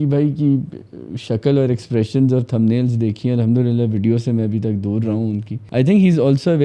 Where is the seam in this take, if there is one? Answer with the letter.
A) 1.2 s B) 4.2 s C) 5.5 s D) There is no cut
C